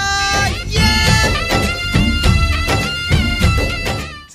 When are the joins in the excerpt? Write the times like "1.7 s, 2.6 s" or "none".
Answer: none